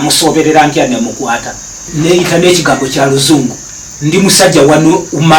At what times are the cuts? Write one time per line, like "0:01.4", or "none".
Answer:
0:01.8